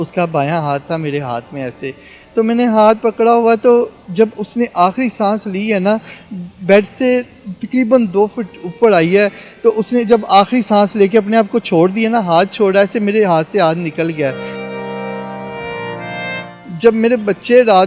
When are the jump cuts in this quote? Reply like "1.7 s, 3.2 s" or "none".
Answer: 14.5 s, 16.3 s

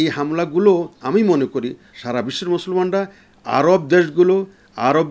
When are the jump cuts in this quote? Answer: 1.9 s

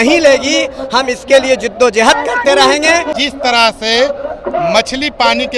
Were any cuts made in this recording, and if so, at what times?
3.2 s

